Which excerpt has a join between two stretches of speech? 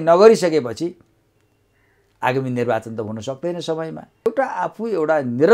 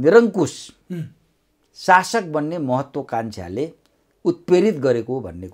first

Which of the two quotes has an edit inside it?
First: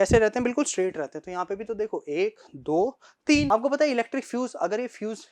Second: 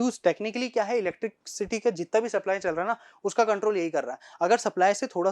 first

